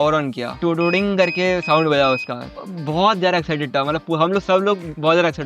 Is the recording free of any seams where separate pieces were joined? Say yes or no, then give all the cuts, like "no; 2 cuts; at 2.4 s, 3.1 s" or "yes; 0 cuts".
no; 1 cut; at 2.6 s